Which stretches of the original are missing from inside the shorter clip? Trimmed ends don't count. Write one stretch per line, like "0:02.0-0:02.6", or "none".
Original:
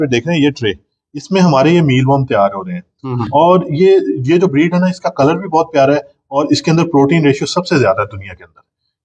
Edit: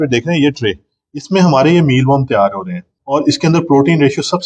0:02.9-0:06.2